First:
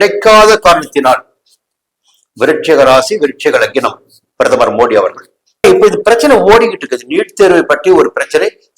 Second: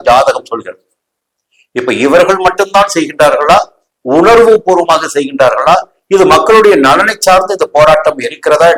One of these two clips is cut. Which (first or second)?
first